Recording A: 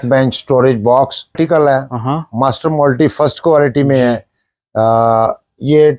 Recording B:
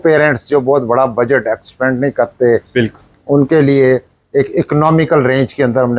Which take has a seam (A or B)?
A